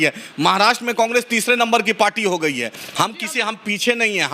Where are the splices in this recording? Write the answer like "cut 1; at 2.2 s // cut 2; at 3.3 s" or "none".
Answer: cut 1; at 2.9 s